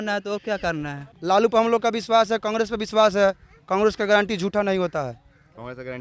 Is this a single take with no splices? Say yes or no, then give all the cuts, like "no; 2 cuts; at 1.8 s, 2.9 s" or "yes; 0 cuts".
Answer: no; 1 cut; at 1.1 s